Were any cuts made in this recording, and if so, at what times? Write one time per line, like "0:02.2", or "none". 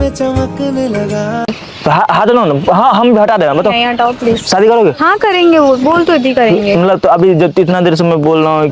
none